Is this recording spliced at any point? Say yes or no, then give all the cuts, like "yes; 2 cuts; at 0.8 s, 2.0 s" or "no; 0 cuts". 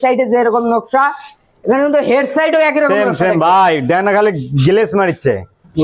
no; 0 cuts